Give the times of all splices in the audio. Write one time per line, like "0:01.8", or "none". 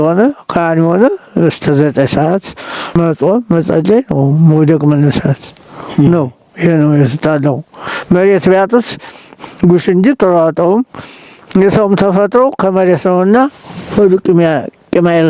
none